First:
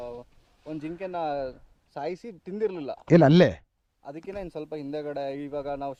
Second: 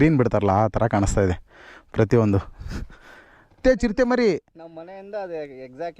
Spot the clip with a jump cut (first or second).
second